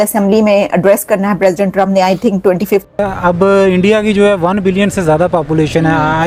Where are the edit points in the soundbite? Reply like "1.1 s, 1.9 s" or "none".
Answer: 2.8 s